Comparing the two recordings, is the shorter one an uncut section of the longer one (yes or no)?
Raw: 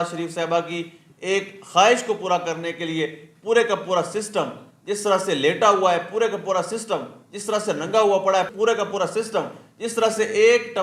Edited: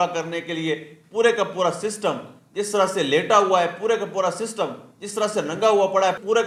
yes